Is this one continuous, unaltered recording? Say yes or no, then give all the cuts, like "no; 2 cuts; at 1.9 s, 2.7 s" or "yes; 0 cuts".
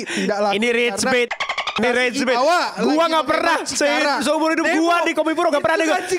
yes; 0 cuts